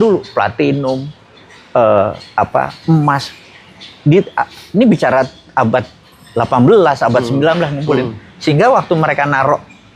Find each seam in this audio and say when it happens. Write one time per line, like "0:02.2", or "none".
none